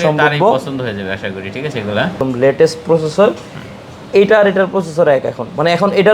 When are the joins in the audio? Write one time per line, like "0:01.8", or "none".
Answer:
0:02.2